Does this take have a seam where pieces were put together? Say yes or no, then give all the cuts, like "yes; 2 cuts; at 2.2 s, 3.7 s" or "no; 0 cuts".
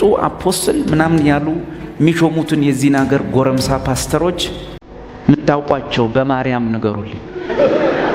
no; 0 cuts